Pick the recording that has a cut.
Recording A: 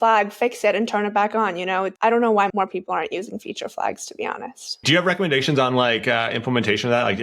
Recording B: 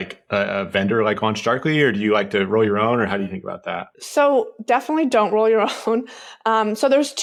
A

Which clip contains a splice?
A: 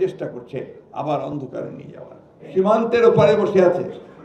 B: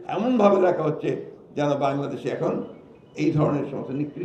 A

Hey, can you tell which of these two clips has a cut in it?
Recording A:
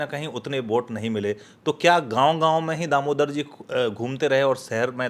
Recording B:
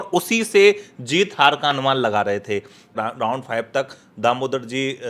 B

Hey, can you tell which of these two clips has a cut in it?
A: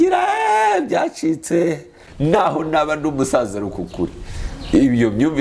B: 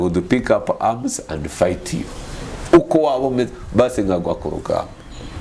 A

